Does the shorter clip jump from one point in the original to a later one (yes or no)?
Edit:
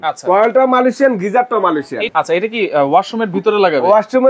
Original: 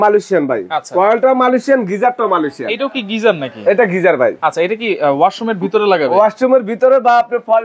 yes